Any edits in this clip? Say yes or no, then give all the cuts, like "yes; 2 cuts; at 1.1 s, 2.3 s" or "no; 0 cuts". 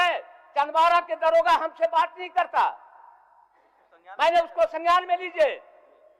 no; 0 cuts